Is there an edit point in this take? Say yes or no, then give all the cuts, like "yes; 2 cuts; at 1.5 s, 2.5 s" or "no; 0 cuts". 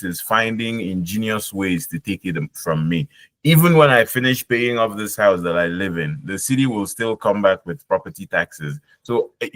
no; 0 cuts